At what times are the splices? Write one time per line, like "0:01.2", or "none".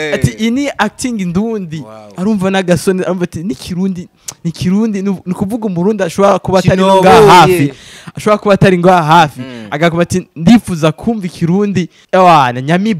0:12.0